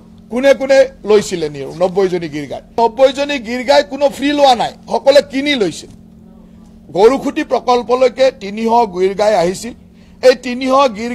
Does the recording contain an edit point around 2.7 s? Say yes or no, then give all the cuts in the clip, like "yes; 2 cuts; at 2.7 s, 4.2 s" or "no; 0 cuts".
yes; 1 cut; at 2.7 s